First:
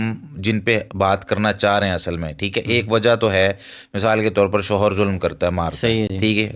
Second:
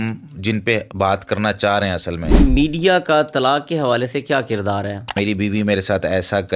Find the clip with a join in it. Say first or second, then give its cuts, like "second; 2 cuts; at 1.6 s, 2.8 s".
second; 2 cuts; at 2.4 s, 5.1 s